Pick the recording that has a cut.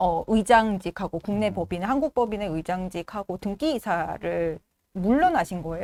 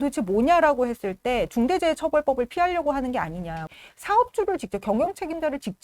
second; 1 cut; at 3.7 s

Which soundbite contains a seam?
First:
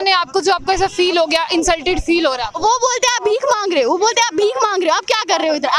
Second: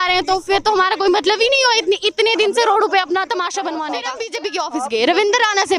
second; 1 cut; at 4.2 s

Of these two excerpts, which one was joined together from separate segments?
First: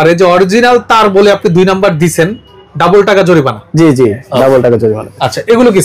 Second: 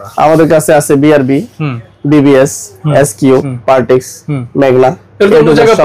second; 1 cut; at 3.5 s

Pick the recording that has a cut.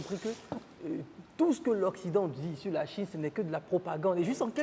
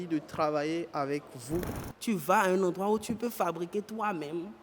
second; 1 cut; at 1.7 s

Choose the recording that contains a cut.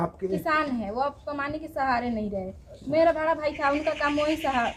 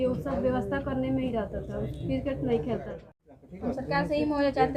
second; 1 cut; at 3.0 s

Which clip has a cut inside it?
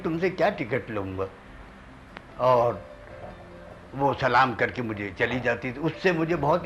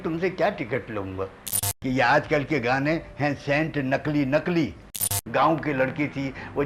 second; 2 cuts; at 1.7 s, 4.9 s

